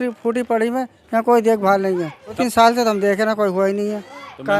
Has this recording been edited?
yes; 1 cut; at 2.4 s

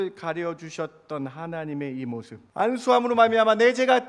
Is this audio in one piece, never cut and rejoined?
no; 1 cut; at 2.4 s

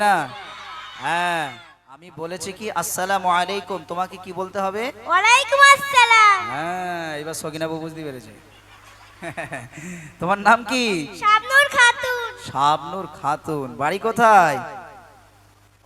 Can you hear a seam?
yes; 1 cut; at 2.1 s

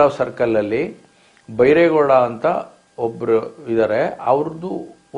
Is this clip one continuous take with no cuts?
yes; 0 cuts

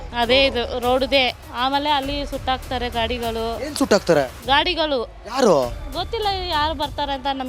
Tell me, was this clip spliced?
yes; 1 cut; at 1.4 s

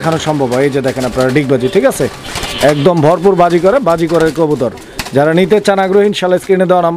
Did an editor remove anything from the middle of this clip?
no; 0 cuts

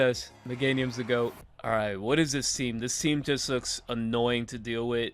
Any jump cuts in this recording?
yes; 1 cut; at 1.5 s

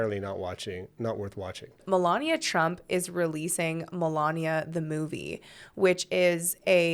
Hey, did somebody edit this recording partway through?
yes; 1 cut; at 1.8 s

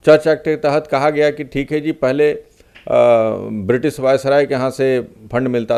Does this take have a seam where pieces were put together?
no; 0 cuts

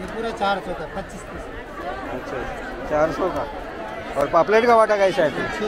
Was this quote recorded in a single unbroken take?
yes; 0 cuts

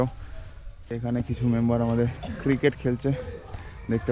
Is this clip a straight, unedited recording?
no; 1 cut; at 1.0 s

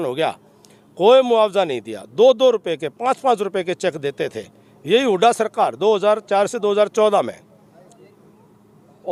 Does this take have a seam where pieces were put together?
no; 0 cuts

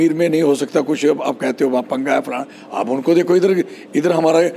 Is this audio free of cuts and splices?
yes; 0 cuts

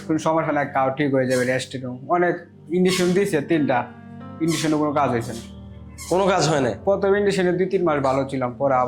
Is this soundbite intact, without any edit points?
yes; 0 cuts

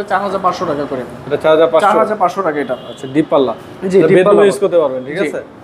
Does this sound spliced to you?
no; 0 cuts

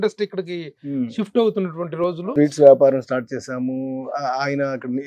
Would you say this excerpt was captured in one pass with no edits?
no; 1 cut; at 2.1 s

